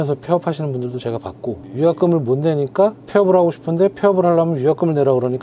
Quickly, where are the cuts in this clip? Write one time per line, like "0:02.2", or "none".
none